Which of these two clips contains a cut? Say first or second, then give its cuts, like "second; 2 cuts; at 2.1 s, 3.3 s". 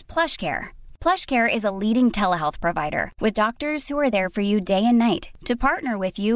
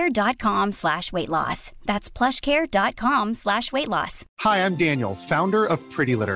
second; 1 cut; at 4.2 s